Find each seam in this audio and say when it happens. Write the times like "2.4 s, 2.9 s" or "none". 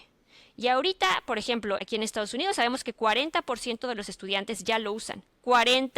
1.8 s

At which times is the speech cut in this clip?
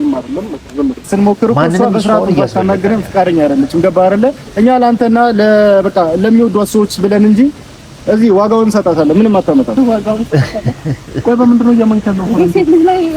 1.1 s

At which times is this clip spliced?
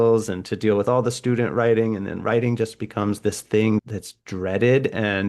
3.8 s

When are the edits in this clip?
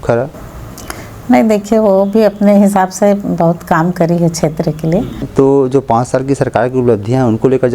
5.2 s

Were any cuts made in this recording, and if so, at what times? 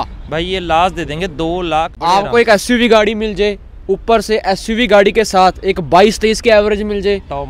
1.9 s

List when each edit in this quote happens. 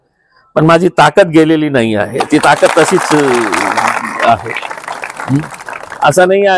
none

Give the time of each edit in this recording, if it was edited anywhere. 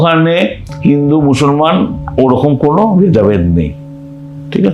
none

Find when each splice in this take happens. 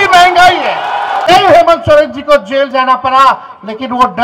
1.3 s

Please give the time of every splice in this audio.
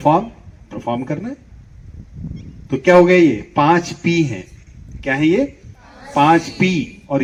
none

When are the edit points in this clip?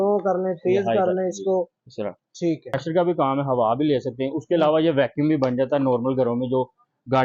2.7 s

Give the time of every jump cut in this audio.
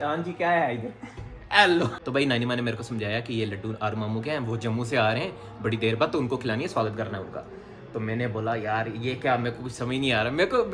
2.0 s

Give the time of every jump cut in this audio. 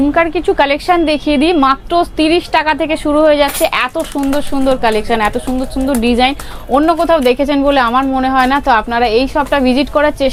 none

